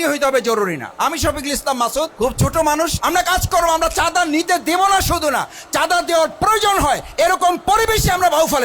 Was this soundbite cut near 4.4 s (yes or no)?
no